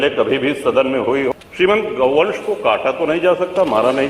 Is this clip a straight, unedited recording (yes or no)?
no